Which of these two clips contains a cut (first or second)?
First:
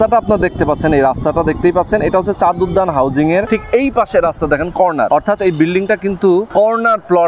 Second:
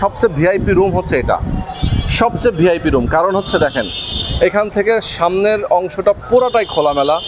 first